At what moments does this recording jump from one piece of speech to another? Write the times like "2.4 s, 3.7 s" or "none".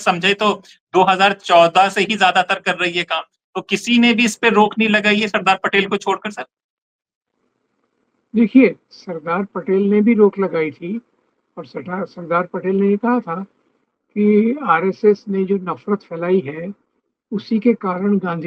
none

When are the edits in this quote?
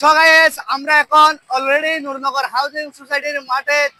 none

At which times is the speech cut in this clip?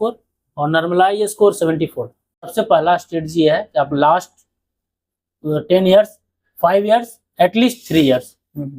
2.5 s

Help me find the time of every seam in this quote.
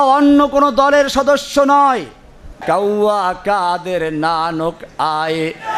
2.4 s

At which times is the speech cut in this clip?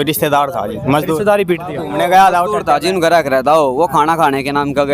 1.8 s

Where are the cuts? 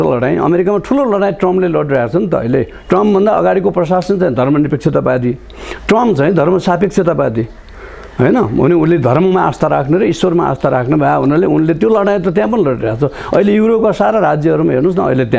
none

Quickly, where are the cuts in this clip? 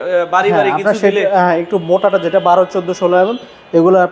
none

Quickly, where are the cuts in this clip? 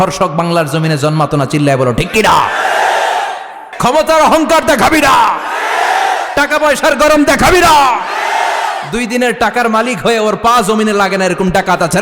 3.7 s

